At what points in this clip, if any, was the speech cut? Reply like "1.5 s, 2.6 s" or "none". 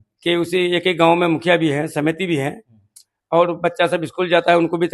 none